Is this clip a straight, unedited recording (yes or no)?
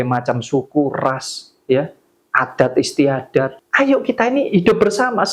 no